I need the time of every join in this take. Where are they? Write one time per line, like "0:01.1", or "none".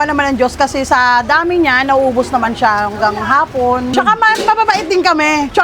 none